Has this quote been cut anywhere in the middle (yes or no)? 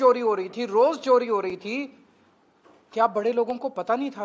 no